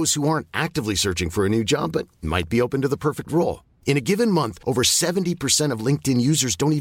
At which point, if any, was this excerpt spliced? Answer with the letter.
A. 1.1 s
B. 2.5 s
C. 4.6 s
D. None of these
D